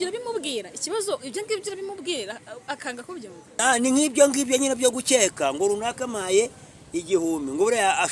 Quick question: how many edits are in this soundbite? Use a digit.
1